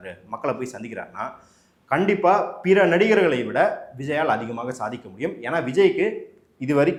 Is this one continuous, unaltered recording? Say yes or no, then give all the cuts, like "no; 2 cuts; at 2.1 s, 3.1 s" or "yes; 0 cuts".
yes; 0 cuts